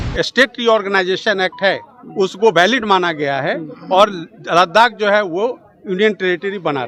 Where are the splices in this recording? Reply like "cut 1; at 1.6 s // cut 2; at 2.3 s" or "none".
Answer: none